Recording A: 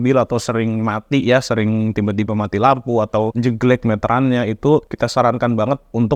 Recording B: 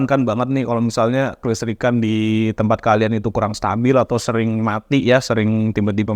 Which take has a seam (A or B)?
A